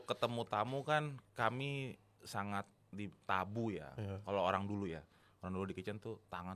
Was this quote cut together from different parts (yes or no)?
no